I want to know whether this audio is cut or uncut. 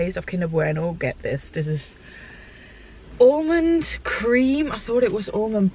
uncut